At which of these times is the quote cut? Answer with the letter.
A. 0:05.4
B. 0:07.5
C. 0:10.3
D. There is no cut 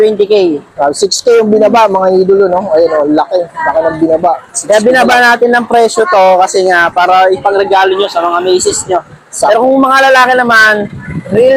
D